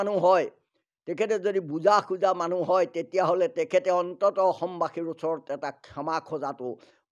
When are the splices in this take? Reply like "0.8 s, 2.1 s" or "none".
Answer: none